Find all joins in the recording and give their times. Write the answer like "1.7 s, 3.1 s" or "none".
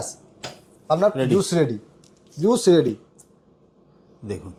none